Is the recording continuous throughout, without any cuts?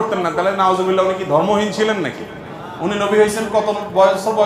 yes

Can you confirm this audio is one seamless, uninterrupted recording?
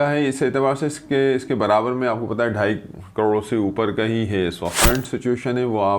no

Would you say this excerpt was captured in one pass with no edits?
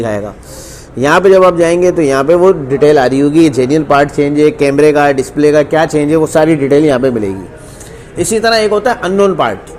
yes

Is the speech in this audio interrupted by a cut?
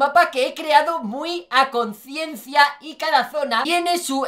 no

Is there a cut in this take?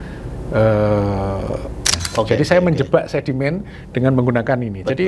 yes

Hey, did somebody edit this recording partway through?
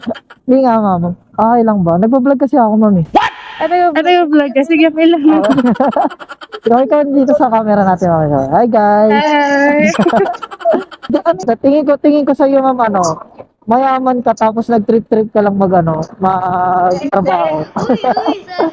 yes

